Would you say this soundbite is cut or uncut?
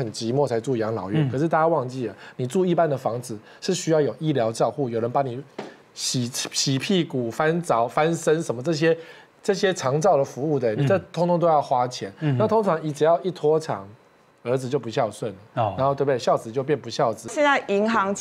cut